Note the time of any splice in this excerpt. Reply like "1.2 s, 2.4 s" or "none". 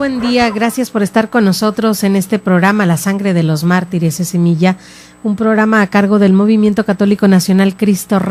4.2 s